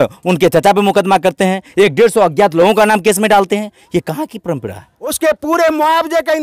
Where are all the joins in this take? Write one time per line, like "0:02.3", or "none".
0:05.2